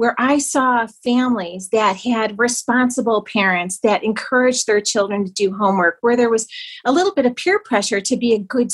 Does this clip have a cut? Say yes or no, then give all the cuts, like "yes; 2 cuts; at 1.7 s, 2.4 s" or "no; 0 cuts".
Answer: no; 0 cuts